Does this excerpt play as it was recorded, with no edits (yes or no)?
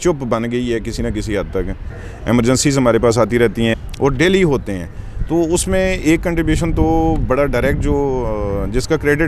no